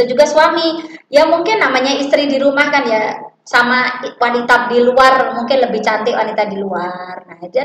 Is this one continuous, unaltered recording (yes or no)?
yes